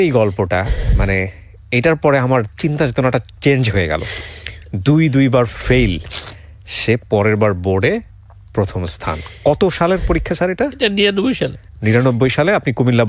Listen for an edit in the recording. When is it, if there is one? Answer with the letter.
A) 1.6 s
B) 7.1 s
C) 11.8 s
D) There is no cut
D